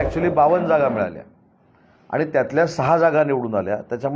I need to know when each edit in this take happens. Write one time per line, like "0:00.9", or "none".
none